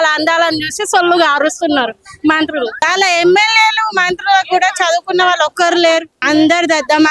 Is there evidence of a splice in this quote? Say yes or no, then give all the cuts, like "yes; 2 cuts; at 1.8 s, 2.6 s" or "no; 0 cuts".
yes; 2 cuts; at 2.8 s, 6.1 s